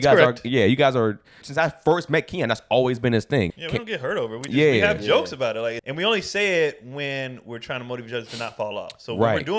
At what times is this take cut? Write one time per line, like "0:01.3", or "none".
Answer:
0:01.4
0:03.5
0:05.8